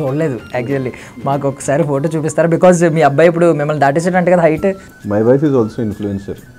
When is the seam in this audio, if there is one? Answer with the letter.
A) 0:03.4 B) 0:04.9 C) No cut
B